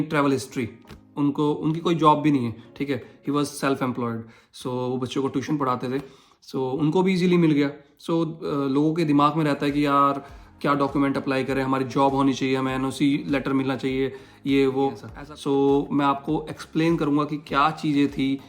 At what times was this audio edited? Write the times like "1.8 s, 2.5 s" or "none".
15.1 s